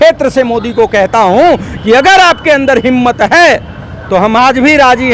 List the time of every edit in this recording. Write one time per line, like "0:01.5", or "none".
none